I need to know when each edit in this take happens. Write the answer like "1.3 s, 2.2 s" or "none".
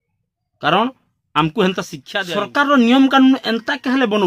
2.0 s

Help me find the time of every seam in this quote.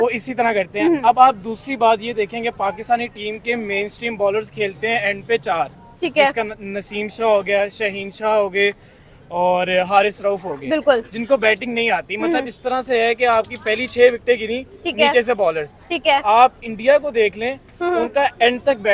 none

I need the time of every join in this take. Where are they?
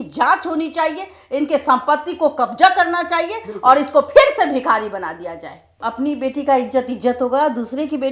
5.8 s

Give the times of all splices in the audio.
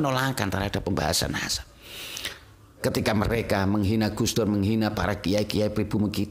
2.7 s

